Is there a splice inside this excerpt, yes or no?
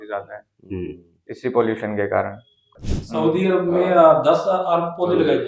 yes